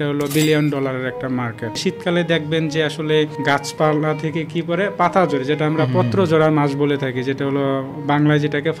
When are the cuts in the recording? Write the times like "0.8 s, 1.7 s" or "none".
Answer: 1.8 s, 3.4 s

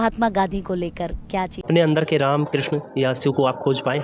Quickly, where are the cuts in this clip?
1.6 s

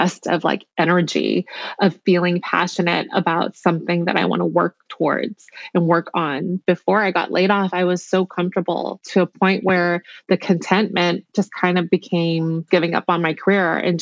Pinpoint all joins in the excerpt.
6.6 s, 9.0 s, 12.7 s

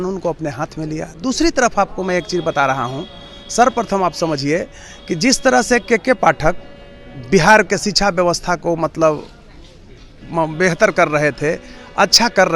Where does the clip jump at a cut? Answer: none

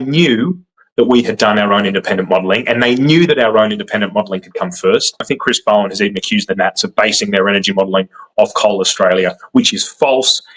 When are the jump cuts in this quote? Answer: 5.2 s

